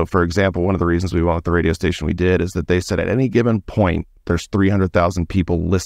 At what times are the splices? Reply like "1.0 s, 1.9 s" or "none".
none